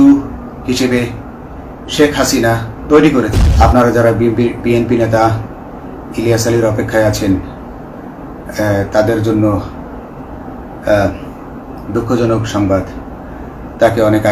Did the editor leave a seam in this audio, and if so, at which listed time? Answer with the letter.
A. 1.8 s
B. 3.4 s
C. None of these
B